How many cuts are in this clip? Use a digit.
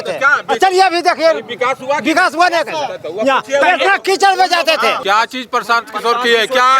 1